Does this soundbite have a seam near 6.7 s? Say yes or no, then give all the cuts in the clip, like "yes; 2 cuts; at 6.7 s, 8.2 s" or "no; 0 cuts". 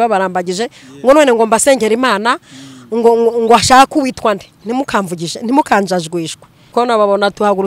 yes; 1 cut; at 6.7 s